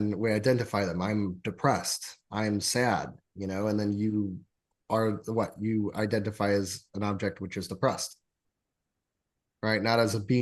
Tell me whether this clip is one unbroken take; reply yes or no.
yes